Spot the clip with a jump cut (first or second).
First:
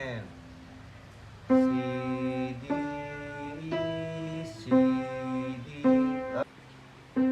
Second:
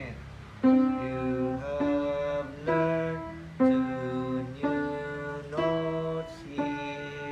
first